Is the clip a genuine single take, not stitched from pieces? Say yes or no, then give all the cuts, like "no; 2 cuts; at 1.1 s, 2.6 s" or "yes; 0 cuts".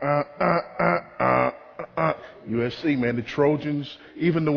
no; 1 cut; at 1.6 s